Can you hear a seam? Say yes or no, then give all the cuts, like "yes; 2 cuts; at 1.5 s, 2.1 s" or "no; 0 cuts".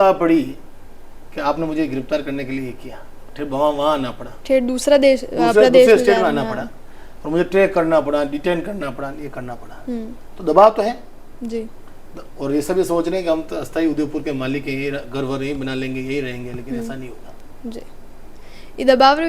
no; 0 cuts